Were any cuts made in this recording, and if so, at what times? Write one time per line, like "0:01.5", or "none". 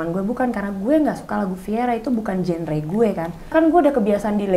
0:03.5